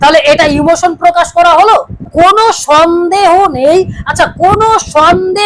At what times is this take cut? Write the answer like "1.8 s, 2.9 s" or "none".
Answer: 2.1 s